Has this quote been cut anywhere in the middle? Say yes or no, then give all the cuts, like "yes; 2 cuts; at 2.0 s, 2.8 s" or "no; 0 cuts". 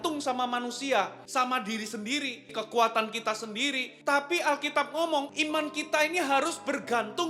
yes; 4 cuts; at 1.2 s, 2.5 s, 3.9 s, 5.3 s